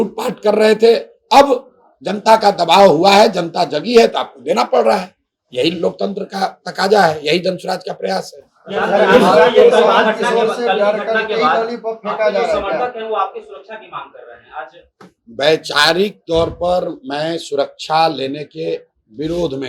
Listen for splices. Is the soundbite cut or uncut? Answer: uncut